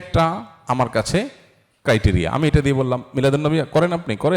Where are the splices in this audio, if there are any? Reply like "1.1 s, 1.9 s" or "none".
none